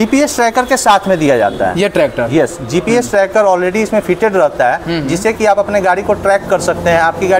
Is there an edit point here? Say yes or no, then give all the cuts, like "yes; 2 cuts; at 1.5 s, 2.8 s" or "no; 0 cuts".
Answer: no; 0 cuts